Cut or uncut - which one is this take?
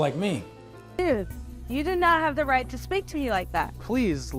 cut